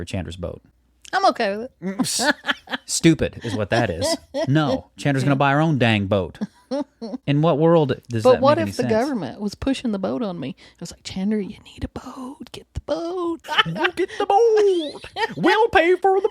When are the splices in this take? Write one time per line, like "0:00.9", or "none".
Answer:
0:13.6